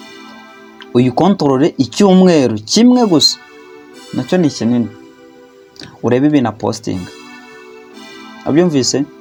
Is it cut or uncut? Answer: uncut